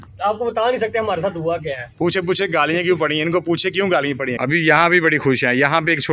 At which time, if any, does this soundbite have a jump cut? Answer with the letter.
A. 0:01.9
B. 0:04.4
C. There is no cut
B